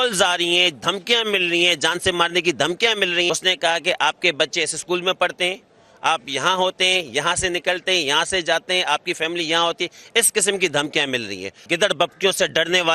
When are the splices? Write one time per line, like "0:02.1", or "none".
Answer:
0:03.3
0:11.6